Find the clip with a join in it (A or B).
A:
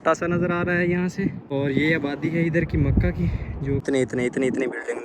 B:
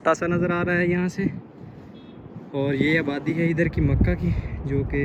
A